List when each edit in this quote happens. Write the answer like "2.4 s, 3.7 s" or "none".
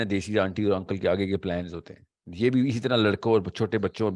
none